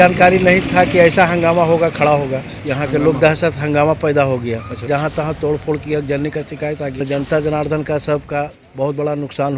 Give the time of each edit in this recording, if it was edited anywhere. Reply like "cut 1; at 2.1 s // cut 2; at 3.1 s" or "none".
cut 1; at 2.5 s // cut 2; at 4.9 s // cut 3; at 7.0 s